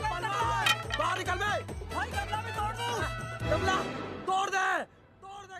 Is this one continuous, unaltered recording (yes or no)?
yes